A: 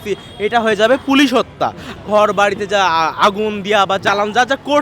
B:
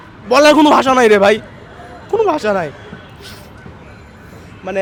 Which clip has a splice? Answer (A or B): A